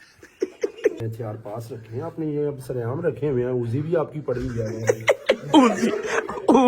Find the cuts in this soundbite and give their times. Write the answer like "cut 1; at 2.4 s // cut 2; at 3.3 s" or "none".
cut 1; at 1.0 s